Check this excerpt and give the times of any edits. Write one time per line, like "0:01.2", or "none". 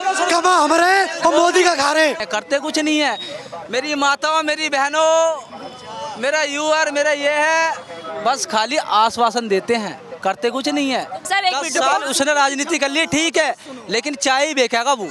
0:02.2
0:11.2